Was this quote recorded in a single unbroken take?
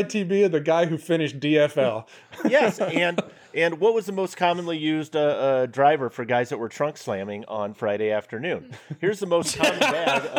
yes; 0 cuts

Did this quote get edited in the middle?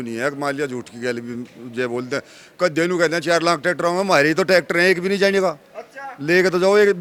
no; 0 cuts

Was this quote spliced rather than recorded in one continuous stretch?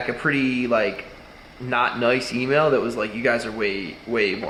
no; 0 cuts

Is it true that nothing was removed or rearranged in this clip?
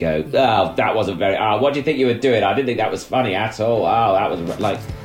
yes; 0 cuts

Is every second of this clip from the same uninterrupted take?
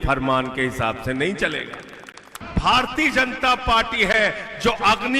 no; 1 cut; at 2.4 s

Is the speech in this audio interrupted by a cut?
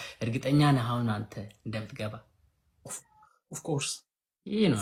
no; 0 cuts

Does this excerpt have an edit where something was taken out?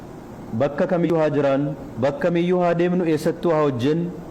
yes; 1 cut; at 1.1 s

